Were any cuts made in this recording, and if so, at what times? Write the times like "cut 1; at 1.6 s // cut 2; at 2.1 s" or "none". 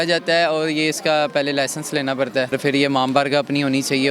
cut 1; at 2.5 s